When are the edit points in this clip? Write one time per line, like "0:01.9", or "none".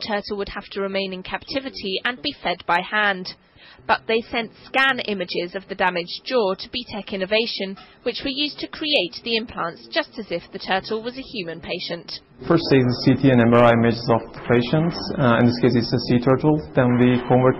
0:05.3